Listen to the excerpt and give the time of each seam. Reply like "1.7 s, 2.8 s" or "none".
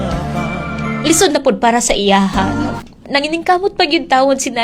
3.0 s